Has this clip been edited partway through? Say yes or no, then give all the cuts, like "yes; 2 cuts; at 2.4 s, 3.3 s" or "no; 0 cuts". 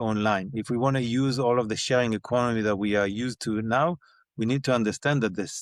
no; 0 cuts